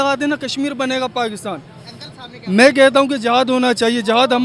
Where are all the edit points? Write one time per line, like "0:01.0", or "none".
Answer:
none